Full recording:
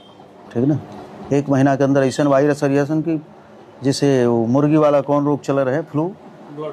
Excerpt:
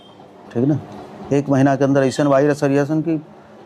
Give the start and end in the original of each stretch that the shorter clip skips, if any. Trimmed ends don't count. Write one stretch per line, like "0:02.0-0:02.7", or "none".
none

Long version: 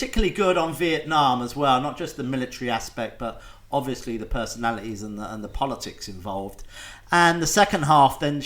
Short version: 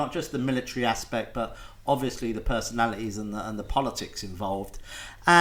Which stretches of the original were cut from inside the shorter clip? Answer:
none

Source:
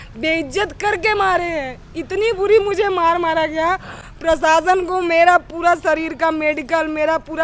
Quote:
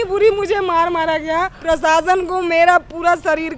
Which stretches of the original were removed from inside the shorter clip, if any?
0:03.8-0:04.1

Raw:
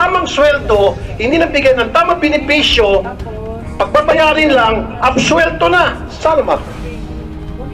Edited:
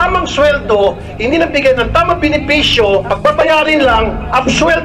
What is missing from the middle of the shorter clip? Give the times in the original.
0:03.1-0:03.8

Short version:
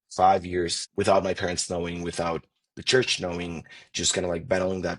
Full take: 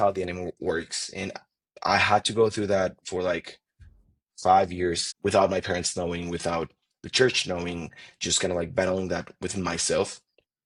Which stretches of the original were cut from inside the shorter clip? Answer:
none

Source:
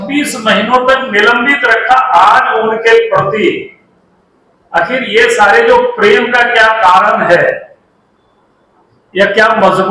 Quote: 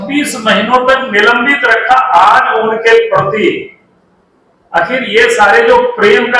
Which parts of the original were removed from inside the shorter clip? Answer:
none

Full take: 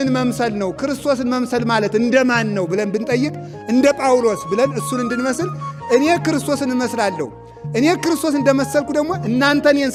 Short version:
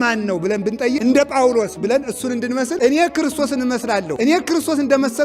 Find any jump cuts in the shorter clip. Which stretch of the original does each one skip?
0:03.3-0:03.7
0:05.4-0:05.8
0:07.2-0:07.7

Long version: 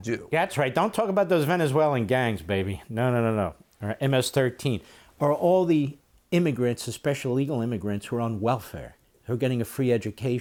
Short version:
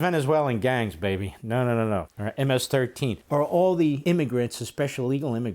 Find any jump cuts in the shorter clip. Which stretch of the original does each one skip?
0:03.6-0:03.8
0:04.8-0:05.1
0:05.9-0:06.3

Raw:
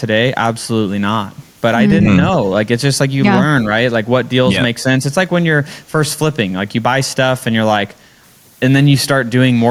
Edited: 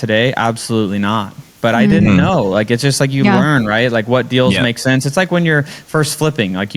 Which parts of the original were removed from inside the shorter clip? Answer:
none

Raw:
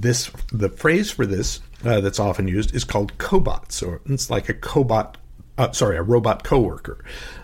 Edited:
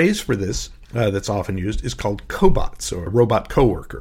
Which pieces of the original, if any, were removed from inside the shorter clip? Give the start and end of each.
0:04.0-0:06.0

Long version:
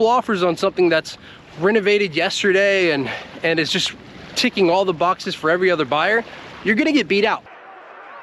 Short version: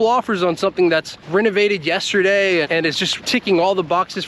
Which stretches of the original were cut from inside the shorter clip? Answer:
0:01.2-0:01.5
0:03.0-0:03.8

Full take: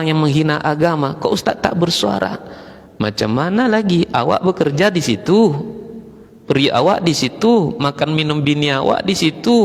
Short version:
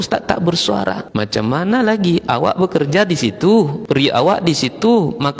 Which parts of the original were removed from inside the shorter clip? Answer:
0:02.4-0:02.9
0:05.6-0:06.4

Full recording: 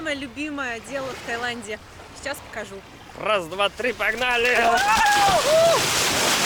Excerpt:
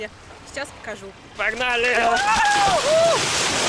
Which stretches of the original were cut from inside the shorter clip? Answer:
0:03.0-0:04.0

